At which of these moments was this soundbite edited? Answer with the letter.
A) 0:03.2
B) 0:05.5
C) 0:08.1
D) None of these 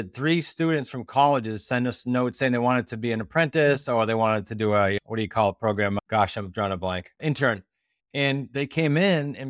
D